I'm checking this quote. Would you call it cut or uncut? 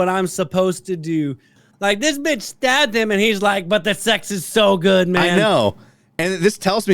cut